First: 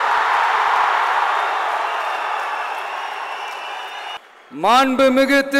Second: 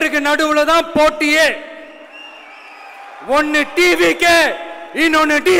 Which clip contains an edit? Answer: first; 1 cut; at 4.2 s

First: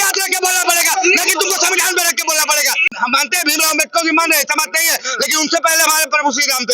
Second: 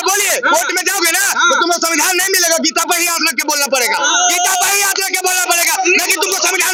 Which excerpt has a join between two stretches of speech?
first; 1 cut; at 2.9 s

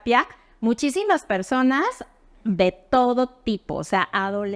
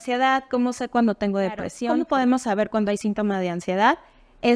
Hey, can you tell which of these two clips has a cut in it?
second; 1 cut; at 1.8 s

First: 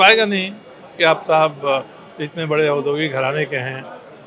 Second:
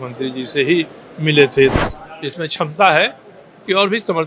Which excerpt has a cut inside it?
second; 1 cut; at 1.7 s

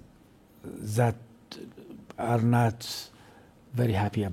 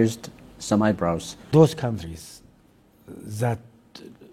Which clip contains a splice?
second; 1 cut; at 1.5 s

